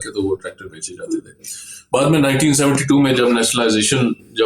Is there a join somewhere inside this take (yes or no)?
no